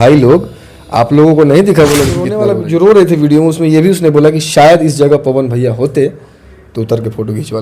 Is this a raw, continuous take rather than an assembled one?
no; 1 cut; at 2.4 s

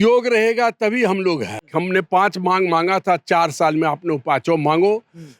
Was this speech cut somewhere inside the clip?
yes; 1 cut; at 1.6 s

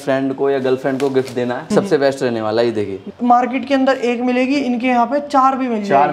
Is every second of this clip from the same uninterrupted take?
no; 2 cuts; at 1.7 s, 3.2 s

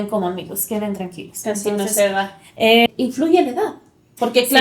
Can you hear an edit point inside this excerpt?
yes; 1 cut; at 2.9 s

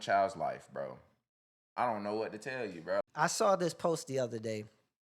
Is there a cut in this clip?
yes; 1 cut; at 3.0 s

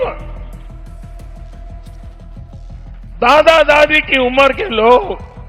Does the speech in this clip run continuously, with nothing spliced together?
no; 2 cuts; at 0.8 s, 3.1 s

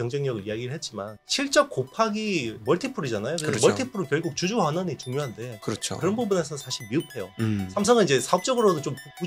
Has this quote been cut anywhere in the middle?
yes; 1 cut; at 1.1 s

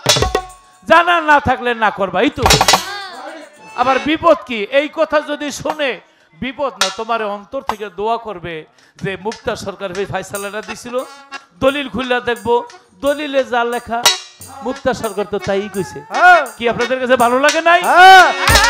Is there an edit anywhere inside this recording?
no; 0 cuts

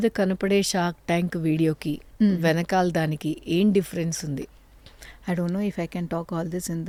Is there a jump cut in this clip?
no; 0 cuts

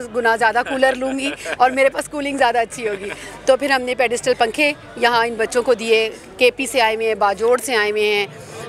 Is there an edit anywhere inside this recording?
no; 0 cuts

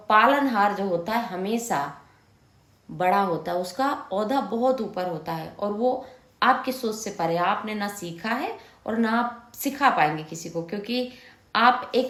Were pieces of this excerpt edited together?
no; 0 cuts

